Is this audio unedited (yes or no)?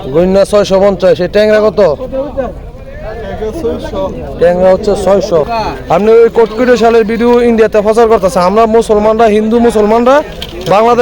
no